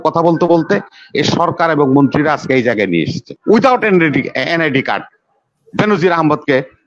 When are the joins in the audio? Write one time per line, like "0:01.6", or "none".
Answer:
0:03.3